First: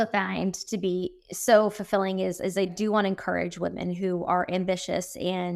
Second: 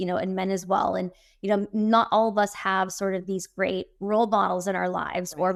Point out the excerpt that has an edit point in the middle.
first; 2 cuts; at 1.2 s, 2.7 s

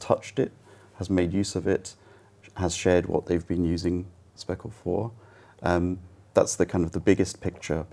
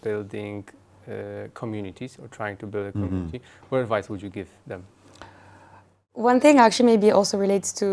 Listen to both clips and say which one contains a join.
second; 1 cut; at 6.0 s

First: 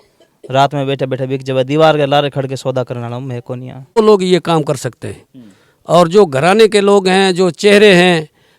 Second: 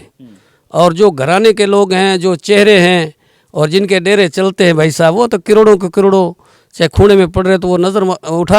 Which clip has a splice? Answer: first; 1 cut; at 4.0 s

